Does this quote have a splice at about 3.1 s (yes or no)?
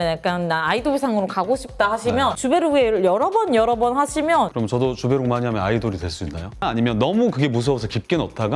no